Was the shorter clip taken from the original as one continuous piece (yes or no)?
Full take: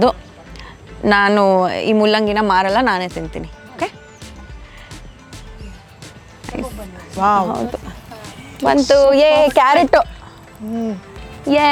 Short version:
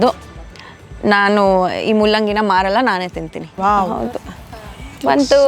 no